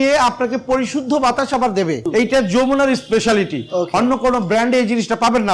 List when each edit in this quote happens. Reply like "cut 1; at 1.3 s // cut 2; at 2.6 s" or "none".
cut 1; at 2.0 s